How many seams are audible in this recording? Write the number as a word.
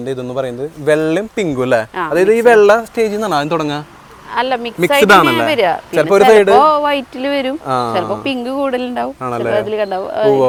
zero